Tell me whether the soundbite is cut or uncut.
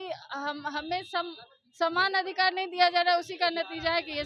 uncut